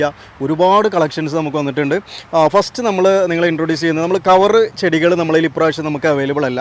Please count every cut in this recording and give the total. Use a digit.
0